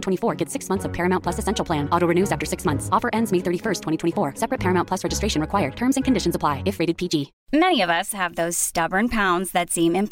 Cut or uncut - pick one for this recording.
cut